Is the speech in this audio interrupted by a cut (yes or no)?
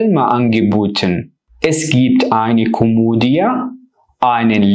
no